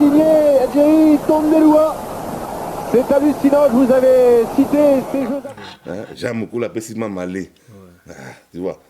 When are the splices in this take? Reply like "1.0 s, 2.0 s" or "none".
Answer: 5.3 s